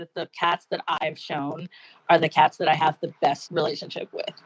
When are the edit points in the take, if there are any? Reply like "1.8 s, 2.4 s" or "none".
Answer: 1.0 s, 3.4 s